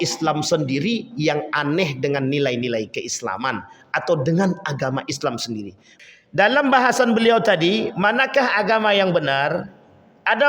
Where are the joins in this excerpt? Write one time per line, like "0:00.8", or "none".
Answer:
0:05.8